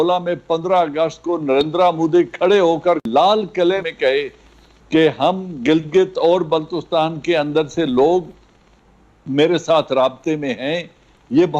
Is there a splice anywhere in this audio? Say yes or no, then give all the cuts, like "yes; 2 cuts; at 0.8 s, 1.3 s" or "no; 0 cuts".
yes; 2 cuts; at 3.0 s, 3.9 s